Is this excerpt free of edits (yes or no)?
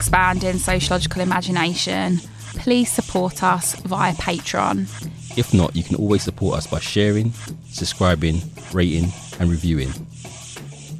no